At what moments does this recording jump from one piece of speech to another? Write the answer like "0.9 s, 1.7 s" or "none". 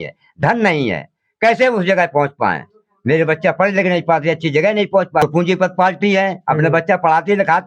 5.2 s